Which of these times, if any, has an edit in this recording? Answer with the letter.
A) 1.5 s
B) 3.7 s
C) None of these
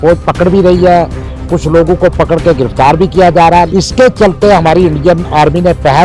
B